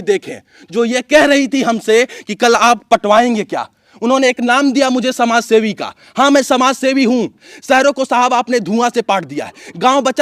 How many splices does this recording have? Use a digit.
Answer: 1